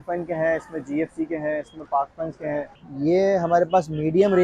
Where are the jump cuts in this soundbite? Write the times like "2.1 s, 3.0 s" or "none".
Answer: 2.8 s